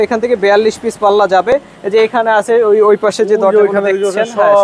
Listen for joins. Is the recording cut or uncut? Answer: uncut